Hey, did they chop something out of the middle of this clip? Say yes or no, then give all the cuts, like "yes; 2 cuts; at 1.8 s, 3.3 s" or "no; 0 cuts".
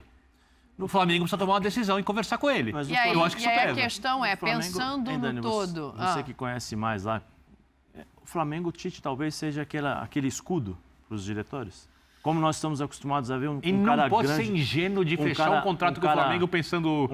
no; 0 cuts